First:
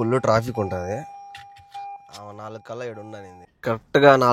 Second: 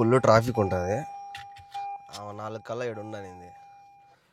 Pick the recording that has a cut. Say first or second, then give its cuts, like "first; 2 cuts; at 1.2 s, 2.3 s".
first; 1 cut; at 3.4 s